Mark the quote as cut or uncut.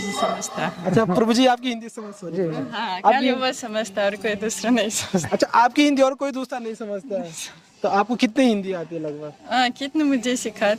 uncut